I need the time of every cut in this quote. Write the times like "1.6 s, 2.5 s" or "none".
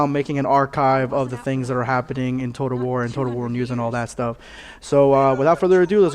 2.4 s